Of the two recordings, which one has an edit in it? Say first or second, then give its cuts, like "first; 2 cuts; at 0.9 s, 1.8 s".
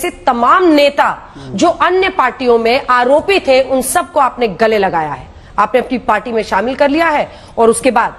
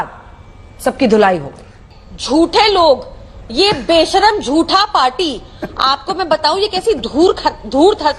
second; 1 cut; at 1.7 s